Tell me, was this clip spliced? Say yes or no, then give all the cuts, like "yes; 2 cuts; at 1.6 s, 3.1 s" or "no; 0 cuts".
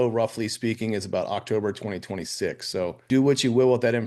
yes; 1 cut; at 3.0 s